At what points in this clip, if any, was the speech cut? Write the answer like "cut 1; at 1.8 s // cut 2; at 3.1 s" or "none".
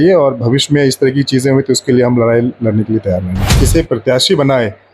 cut 1; at 3.6 s

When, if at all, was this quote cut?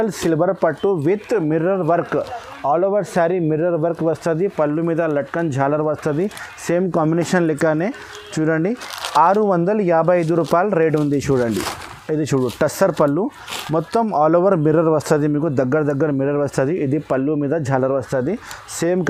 none

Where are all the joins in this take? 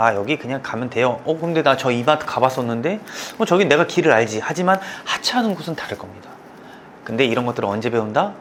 none

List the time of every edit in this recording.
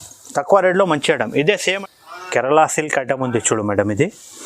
cut 1; at 1.8 s

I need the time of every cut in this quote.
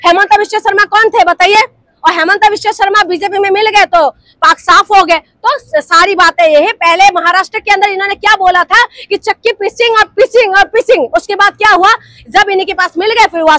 none

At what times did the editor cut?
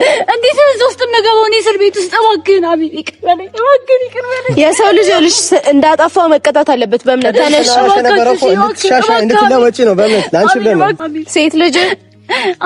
cut 1; at 11.0 s

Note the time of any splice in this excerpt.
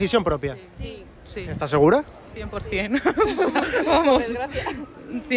none

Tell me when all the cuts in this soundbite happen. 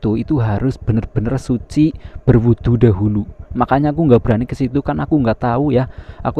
none

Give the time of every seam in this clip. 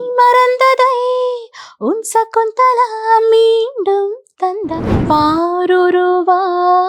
cut 1; at 4.9 s

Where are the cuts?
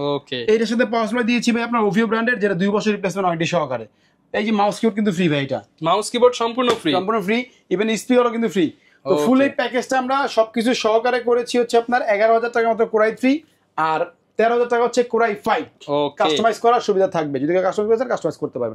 none

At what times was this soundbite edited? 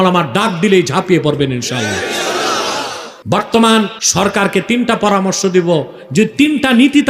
cut 1; at 3.1 s // cut 2; at 4.0 s

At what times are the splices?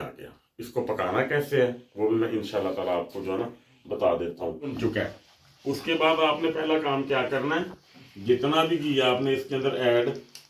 cut 1; at 4.8 s

